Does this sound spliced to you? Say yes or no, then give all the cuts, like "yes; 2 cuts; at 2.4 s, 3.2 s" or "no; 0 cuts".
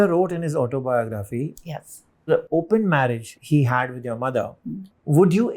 yes; 1 cut; at 4.6 s